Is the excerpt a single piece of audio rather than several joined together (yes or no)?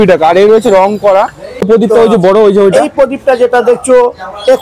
no